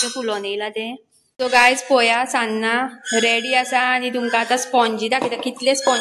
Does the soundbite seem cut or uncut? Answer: cut